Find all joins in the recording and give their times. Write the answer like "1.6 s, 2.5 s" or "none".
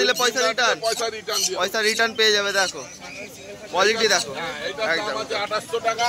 none